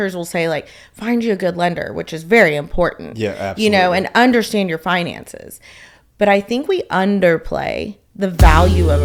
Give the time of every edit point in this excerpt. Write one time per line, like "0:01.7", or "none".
none